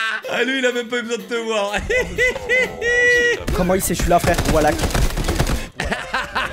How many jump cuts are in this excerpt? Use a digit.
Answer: 1